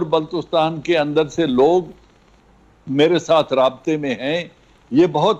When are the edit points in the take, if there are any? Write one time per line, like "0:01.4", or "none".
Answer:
none